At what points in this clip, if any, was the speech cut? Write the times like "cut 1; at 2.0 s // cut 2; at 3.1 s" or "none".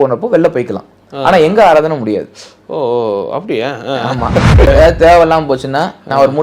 cut 1; at 4.7 s